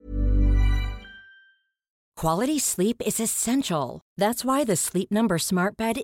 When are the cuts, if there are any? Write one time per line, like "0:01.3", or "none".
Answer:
0:02.0